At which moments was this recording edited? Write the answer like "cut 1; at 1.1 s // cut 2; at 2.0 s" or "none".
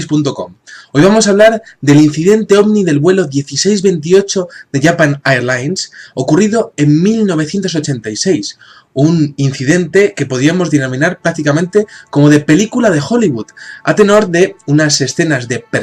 none

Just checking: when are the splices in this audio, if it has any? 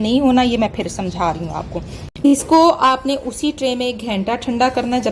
cut 1; at 2.0 s

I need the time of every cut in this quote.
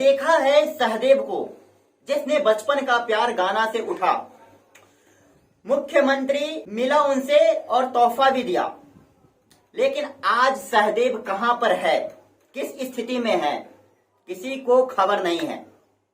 cut 1; at 6.6 s

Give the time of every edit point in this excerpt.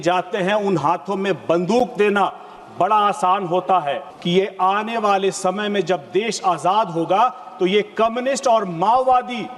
cut 1; at 4.1 s

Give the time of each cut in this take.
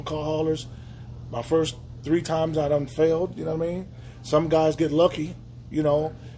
none

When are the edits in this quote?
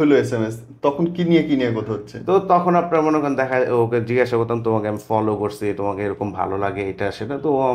none

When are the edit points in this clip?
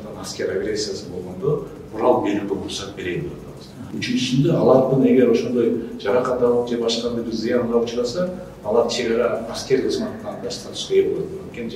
cut 1; at 3.8 s

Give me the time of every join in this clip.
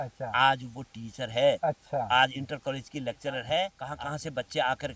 cut 1; at 3.8 s

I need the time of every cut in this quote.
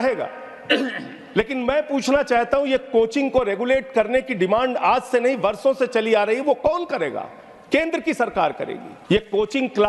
cut 1; at 8.9 s

